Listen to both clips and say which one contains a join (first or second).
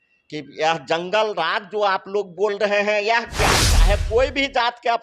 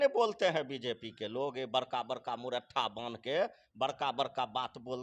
first